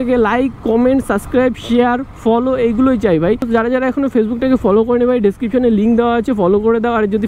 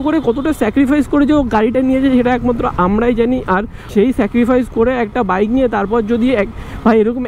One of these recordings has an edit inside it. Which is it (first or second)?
second